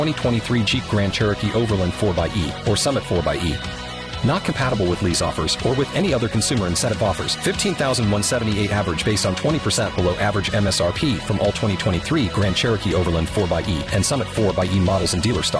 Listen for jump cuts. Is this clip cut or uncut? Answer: uncut